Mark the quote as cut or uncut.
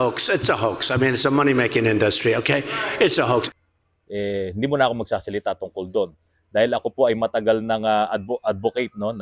uncut